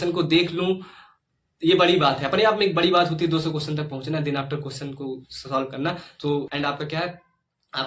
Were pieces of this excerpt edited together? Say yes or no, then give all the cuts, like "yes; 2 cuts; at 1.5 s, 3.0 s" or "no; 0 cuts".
yes; 1 cut; at 6.5 s